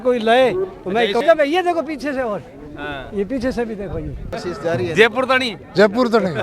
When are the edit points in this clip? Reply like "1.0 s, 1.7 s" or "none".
1.2 s, 4.3 s

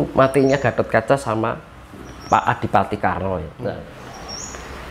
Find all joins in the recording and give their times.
3.9 s

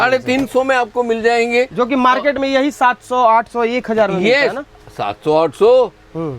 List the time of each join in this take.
none

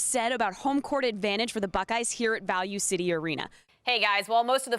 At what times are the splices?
3.6 s

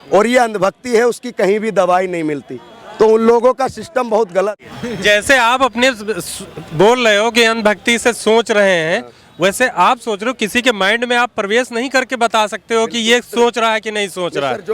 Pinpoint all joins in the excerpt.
4.6 s

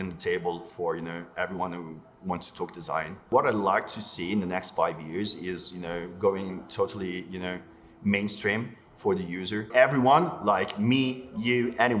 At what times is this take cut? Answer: 3.3 s, 9.7 s

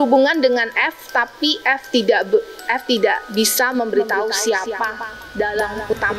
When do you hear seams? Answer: none

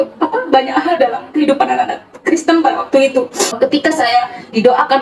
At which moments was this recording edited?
3.6 s

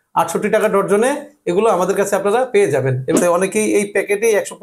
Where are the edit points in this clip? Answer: 3.2 s

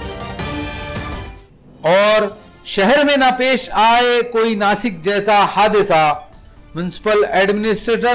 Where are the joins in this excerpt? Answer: 1.3 s

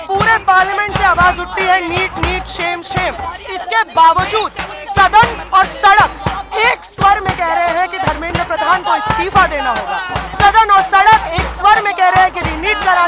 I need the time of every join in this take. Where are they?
none

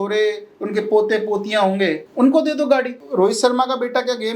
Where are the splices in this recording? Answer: 2.0 s, 3.0 s

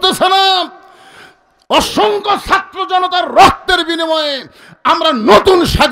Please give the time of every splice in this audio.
none

